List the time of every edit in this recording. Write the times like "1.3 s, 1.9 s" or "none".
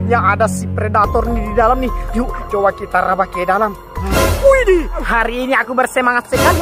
5.0 s